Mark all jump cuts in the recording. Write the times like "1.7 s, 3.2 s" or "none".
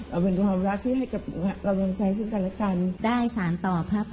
3.0 s